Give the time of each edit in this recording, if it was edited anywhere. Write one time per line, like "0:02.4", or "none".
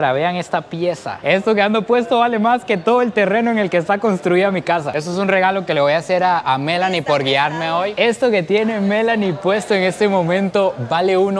0:01.2
0:04.9
0:07.9